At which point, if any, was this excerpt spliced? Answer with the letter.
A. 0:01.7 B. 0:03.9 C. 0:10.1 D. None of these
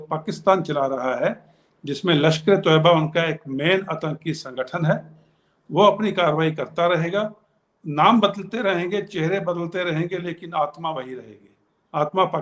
D